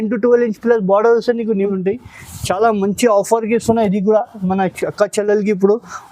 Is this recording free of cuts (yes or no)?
no